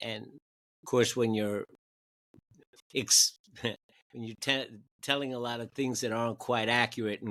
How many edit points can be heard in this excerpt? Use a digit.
0